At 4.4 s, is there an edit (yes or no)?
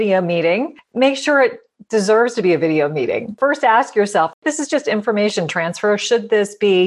yes